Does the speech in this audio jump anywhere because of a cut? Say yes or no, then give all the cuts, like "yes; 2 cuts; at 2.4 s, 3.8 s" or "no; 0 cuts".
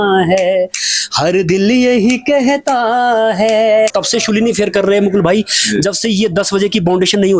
yes; 1 cut; at 4.0 s